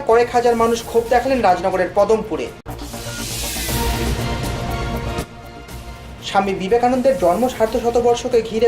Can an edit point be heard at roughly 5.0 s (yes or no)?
yes